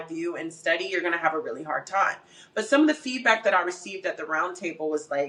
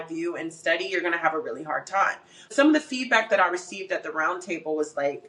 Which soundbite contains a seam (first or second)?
second